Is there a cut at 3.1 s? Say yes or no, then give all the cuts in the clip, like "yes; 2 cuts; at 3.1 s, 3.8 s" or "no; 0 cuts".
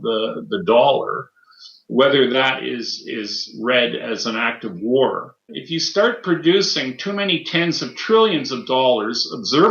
no; 1 cut; at 5.5 s